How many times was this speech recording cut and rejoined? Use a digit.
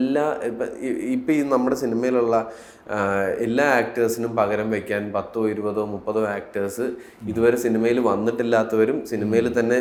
0